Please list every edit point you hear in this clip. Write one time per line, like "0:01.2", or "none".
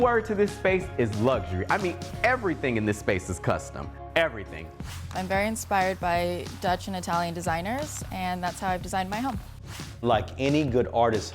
0:04.8
0:10.0